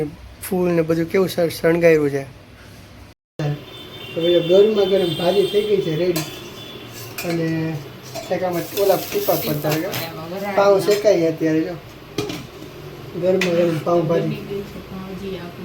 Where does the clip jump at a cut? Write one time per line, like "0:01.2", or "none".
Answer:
0:03.4